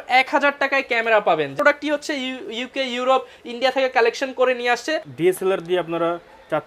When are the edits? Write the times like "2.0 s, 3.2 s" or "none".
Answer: 1.5 s, 5.1 s